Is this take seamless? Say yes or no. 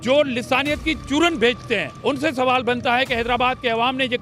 no